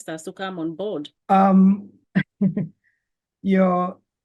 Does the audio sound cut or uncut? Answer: cut